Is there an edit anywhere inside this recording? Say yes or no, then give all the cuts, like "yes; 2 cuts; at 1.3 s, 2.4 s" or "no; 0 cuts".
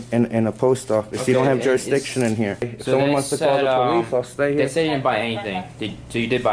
yes; 1 cut; at 2.7 s